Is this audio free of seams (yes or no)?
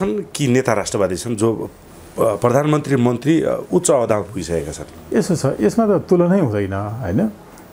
yes